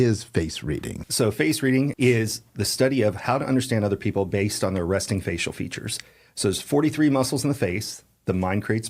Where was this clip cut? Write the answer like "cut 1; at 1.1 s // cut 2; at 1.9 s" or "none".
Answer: cut 1; at 1.0 s // cut 2; at 1.9 s